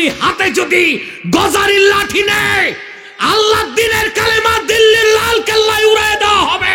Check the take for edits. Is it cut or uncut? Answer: uncut